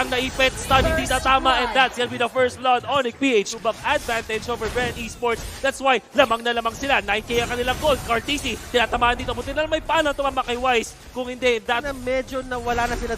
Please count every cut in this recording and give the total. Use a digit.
2